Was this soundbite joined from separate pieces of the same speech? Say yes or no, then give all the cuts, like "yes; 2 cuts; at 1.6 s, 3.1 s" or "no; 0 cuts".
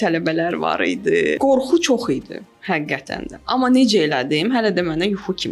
yes; 1 cut; at 1.4 s